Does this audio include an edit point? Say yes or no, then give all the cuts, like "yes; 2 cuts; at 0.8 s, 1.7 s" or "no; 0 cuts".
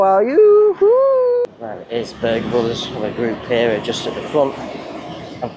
yes; 1 cut; at 1.4 s